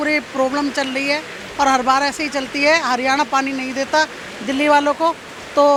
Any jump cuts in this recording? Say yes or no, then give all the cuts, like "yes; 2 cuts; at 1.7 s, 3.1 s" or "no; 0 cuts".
no; 0 cuts